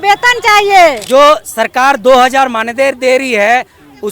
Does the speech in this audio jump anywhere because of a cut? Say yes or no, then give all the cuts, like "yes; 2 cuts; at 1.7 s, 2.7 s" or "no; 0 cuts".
yes; 1 cut; at 1.0 s